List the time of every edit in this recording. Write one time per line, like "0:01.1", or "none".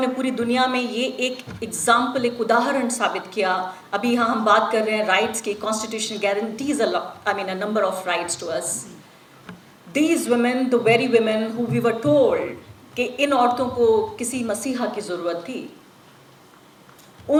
none